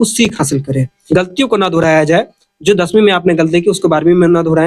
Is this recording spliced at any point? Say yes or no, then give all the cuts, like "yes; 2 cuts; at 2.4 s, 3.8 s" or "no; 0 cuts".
yes; 1 cut; at 0.9 s